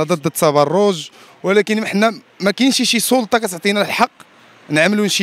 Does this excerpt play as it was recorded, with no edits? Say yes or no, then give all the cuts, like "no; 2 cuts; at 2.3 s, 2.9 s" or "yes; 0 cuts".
yes; 0 cuts